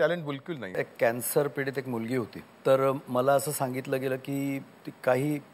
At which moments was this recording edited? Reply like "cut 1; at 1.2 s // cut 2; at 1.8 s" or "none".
cut 1; at 0.8 s // cut 2; at 2.4 s